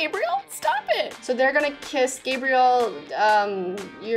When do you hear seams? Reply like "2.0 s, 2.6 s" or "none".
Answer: 1.1 s